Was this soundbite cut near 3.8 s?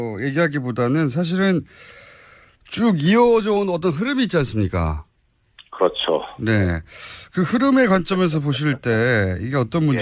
yes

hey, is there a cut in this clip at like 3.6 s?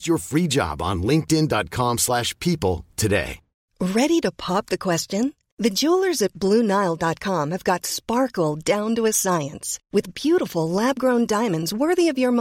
yes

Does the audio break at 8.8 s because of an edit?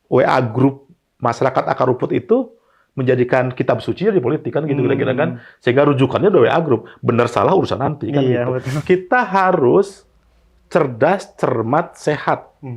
yes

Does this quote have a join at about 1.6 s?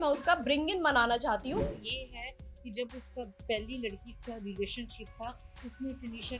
yes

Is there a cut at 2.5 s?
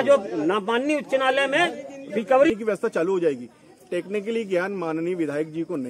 yes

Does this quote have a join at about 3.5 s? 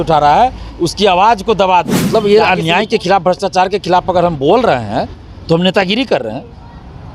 no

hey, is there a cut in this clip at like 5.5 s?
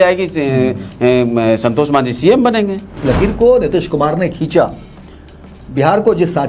no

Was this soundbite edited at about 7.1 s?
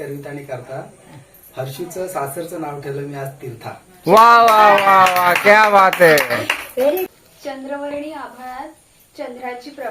yes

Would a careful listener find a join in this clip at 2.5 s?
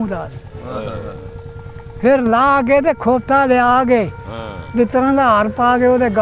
no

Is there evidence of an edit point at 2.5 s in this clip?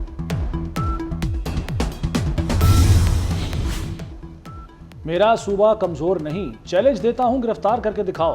yes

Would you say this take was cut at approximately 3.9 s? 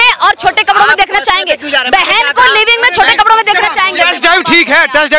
yes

